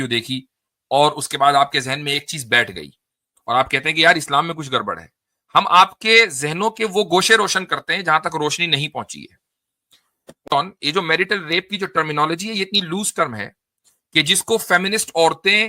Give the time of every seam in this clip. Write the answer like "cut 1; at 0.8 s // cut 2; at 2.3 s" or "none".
cut 1; at 10.5 s